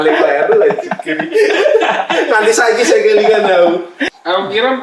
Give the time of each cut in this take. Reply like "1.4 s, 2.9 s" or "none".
3.9 s